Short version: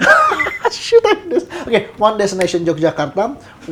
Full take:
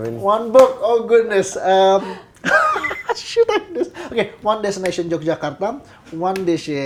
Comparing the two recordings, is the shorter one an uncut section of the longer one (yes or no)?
yes